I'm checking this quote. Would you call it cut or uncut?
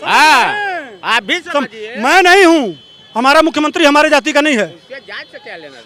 uncut